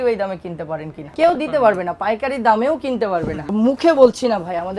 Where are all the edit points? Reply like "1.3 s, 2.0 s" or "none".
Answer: 1.0 s, 3.4 s